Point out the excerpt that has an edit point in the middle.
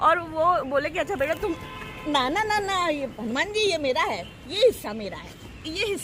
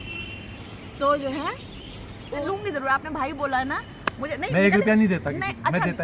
second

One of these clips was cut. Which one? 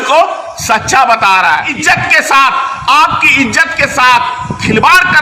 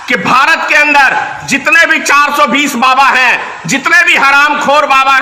first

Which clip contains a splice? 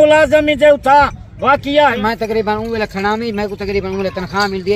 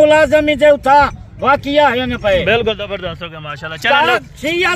first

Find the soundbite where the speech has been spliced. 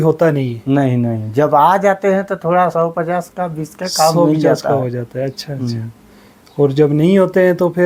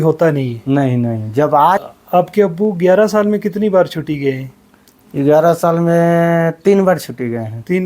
second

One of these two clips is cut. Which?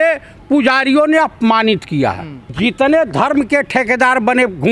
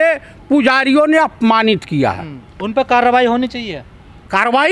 first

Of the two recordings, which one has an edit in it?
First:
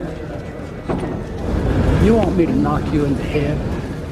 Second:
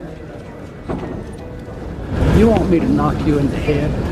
first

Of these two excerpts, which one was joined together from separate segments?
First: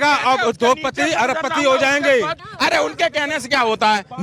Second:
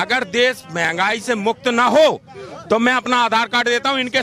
first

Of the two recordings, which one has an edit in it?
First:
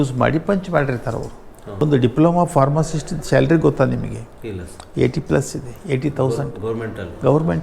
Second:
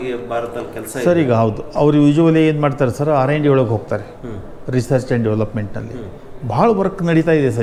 first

